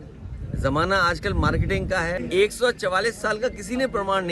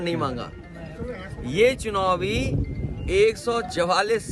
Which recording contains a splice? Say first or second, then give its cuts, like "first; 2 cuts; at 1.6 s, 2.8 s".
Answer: first; 1 cut; at 2.2 s